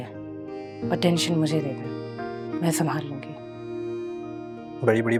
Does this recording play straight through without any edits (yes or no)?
yes